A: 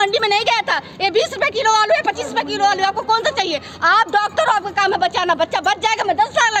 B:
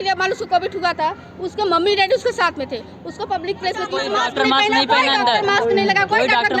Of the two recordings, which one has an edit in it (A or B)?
B